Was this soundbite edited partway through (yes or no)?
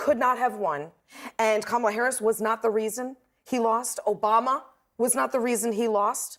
no